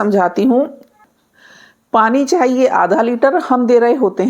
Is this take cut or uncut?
cut